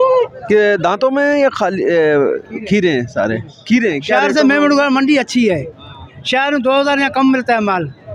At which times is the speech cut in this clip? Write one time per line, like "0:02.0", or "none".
0:04.2